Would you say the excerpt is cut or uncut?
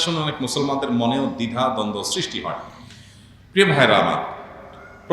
uncut